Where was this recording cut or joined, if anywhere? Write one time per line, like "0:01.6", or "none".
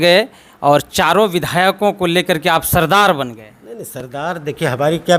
none